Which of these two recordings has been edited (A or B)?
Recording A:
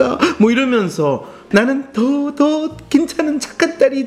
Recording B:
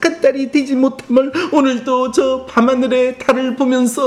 A